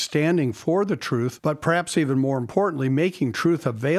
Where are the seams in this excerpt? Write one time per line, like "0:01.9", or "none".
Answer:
0:01.3